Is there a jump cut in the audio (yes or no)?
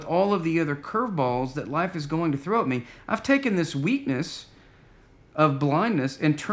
no